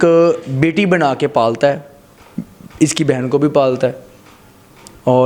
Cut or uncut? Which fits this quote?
uncut